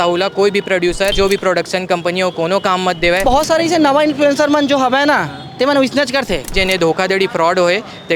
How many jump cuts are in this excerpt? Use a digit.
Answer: 3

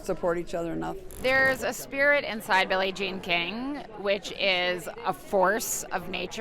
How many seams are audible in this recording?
1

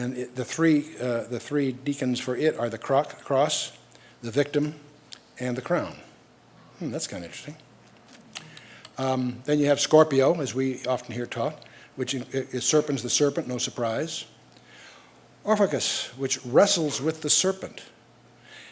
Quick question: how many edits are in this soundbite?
1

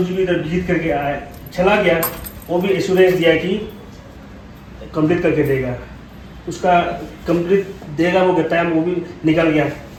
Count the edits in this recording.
0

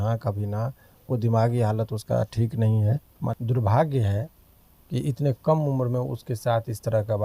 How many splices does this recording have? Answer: 1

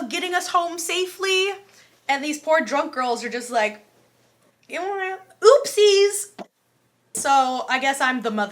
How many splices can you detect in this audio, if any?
1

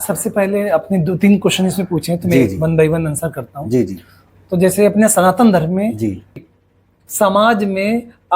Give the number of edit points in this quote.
1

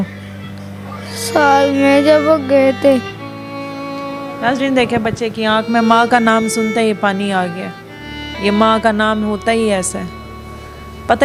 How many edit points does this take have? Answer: 0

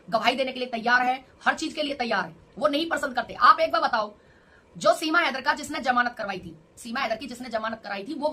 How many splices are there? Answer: 0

